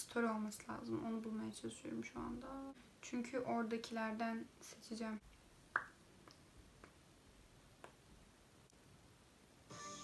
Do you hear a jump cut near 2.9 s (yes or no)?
no